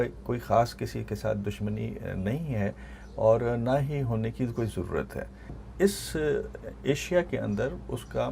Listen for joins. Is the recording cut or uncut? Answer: cut